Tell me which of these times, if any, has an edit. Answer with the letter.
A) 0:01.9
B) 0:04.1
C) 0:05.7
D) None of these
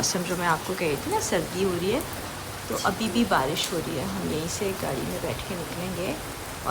D